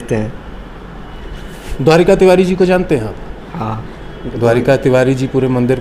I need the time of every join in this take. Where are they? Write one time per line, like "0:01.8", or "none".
none